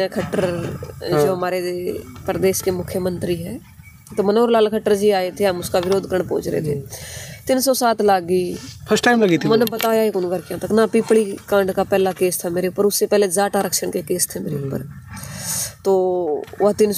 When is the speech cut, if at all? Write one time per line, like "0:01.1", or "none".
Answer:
none